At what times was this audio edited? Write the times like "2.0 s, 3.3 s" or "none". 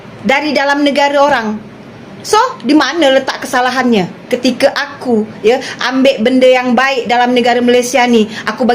none

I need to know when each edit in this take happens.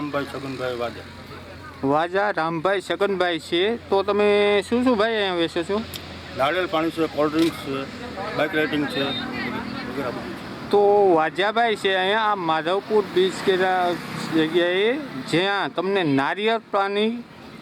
none

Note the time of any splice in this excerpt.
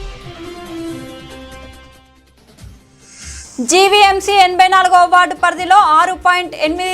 3.4 s

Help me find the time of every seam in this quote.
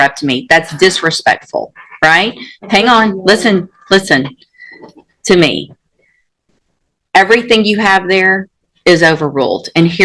none

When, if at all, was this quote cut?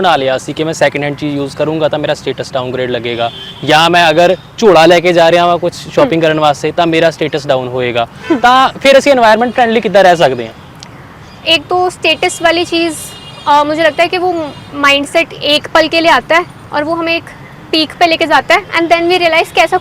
none

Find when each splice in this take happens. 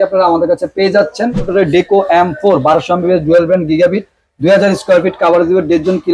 1.5 s

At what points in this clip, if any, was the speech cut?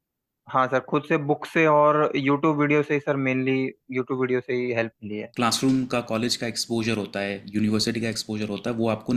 5.3 s

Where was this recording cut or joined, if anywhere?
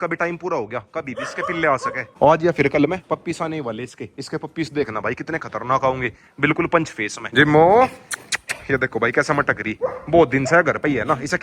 none

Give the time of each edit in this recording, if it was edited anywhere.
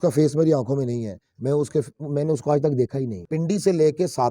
3.2 s

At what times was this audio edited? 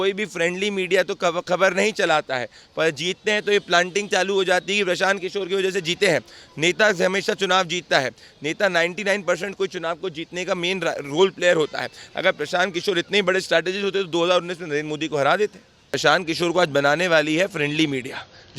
16.0 s

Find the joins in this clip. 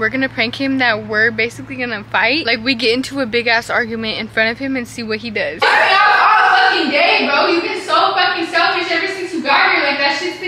2.4 s, 5.6 s

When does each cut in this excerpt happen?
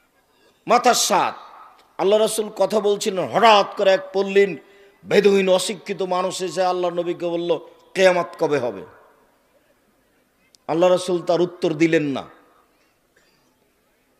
3.0 s

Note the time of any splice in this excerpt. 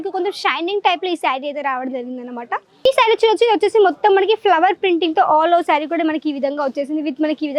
2.9 s

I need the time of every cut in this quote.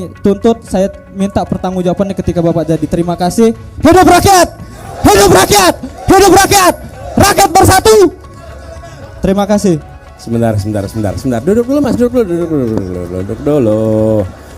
none

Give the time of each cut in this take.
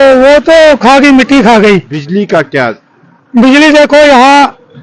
2.0 s

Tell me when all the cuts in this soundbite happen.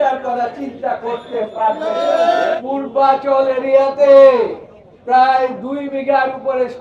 2.5 s

